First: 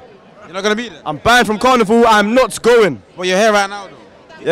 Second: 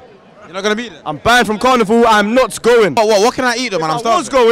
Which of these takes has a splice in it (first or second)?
second